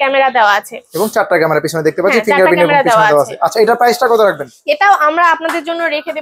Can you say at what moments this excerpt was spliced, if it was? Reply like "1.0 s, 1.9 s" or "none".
none